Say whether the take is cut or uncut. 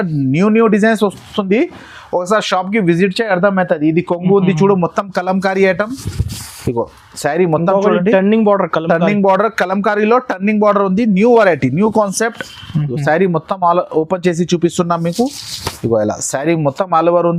uncut